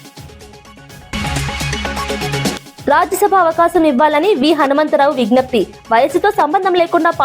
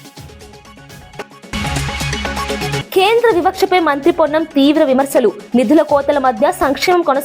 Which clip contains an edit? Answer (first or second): second